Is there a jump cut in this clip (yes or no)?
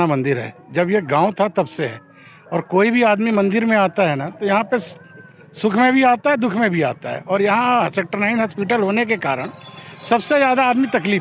no